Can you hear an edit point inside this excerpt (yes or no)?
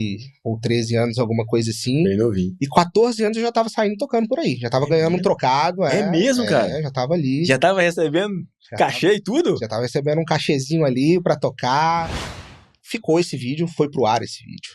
yes